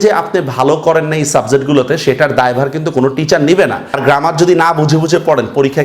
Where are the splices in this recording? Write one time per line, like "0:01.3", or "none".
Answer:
0:03.9

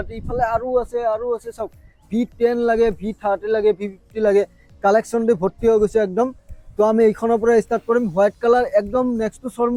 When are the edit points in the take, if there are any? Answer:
none

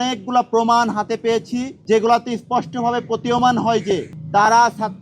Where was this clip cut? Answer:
0:01.7
0:04.1

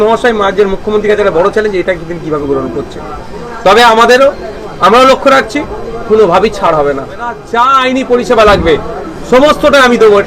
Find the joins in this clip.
0:07.4

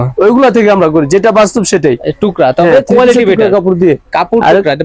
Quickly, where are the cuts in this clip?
none

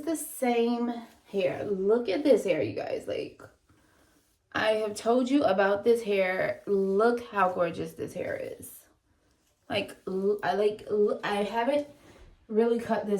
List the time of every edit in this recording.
none

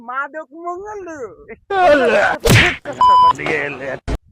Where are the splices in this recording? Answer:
none

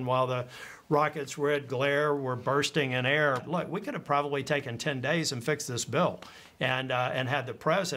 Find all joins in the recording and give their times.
0:03.4

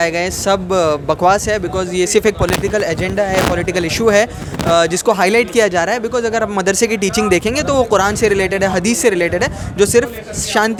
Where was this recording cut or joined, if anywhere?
none

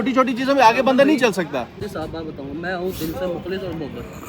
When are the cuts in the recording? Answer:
0:01.8

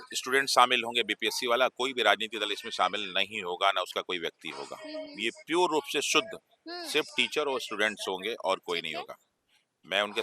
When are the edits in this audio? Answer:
none

